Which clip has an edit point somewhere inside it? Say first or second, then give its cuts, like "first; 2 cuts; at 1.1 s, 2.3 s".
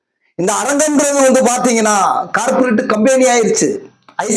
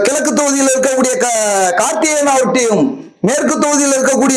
first; 1 cut; at 2.7 s